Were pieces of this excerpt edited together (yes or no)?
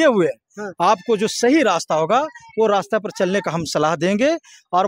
no